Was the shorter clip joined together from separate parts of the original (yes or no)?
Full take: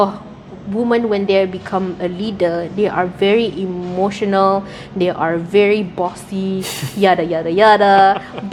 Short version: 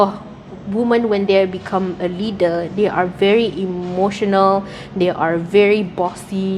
no